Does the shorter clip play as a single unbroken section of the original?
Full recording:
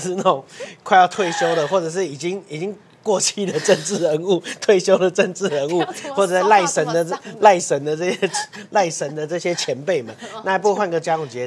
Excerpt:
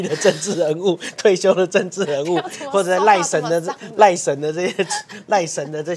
yes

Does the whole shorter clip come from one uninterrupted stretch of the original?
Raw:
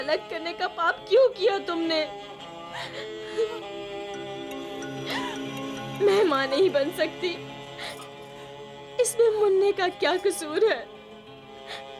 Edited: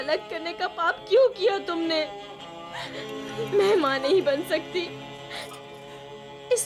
no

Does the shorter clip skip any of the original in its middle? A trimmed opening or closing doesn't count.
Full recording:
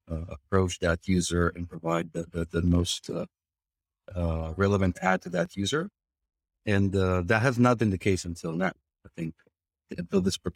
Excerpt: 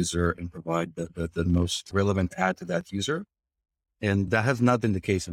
yes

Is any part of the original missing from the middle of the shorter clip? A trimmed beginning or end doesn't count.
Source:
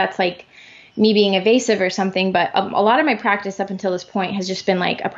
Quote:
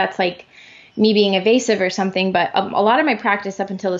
no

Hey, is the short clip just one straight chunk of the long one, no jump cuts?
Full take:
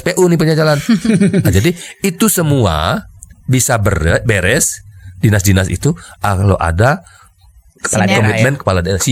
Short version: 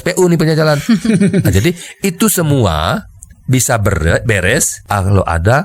no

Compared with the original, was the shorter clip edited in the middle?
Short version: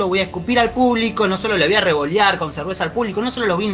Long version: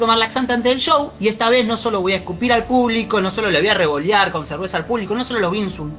no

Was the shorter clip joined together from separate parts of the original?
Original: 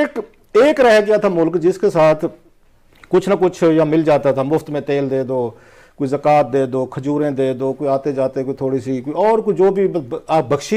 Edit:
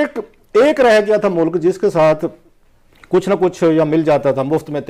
no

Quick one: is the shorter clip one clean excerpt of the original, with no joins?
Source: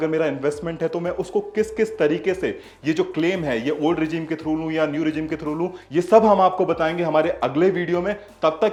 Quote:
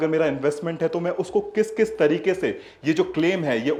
yes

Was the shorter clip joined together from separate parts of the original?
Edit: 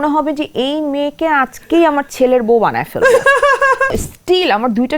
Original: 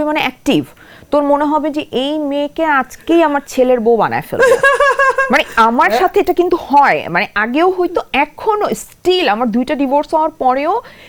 yes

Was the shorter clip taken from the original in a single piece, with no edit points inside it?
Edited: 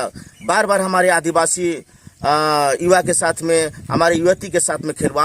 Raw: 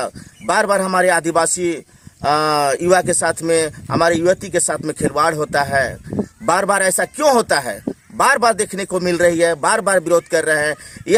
yes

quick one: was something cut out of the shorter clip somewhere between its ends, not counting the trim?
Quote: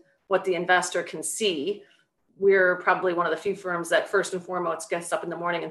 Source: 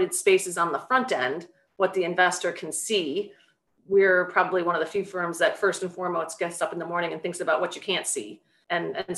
no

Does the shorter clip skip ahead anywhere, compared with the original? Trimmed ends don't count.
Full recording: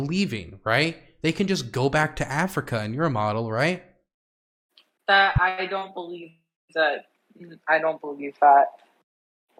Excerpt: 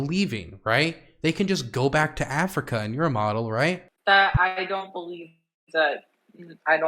yes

